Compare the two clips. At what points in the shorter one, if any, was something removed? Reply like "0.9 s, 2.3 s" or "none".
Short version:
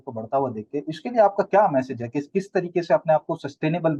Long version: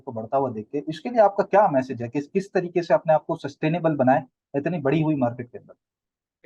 none

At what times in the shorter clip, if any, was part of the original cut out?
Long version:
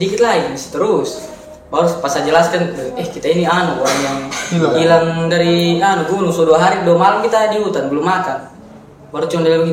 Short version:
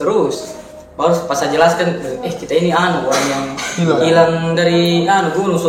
none

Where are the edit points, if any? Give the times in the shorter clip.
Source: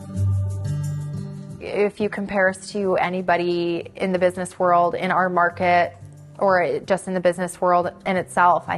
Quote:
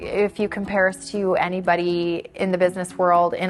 none

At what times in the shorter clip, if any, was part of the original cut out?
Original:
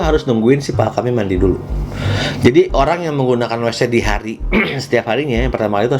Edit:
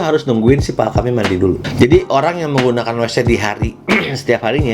1.7 s

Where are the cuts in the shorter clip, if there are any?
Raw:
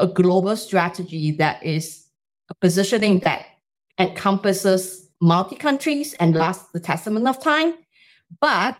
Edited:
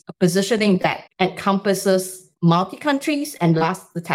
1.0 s

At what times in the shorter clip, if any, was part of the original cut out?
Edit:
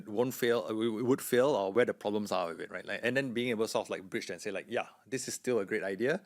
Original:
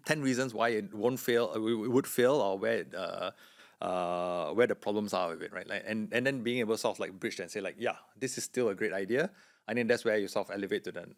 1.7 s, 3.0 s

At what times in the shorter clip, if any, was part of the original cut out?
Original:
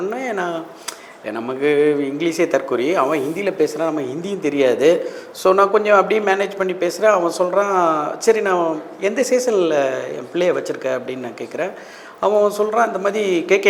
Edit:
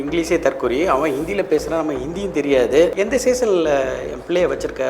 2.9 s

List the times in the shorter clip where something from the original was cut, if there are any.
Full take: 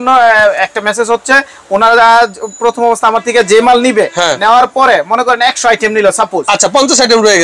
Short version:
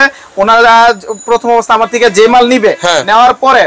none

